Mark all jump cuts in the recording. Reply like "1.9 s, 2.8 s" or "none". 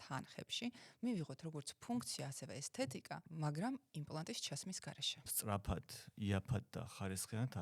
3.3 s, 5.3 s